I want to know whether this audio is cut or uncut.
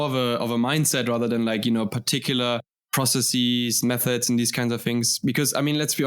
cut